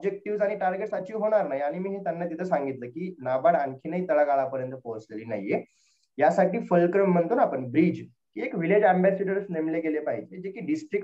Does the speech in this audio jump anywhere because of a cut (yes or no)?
no